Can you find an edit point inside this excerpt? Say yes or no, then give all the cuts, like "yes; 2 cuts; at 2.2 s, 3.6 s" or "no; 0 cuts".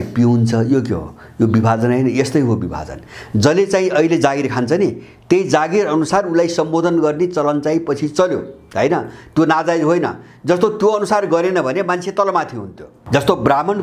no; 0 cuts